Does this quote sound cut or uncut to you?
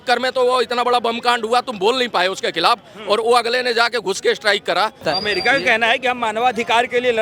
cut